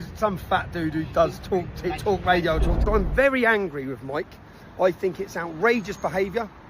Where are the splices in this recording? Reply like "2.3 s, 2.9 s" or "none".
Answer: 2.8 s